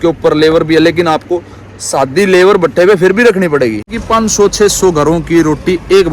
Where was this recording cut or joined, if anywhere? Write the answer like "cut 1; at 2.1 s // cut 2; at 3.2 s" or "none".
cut 1; at 4.0 s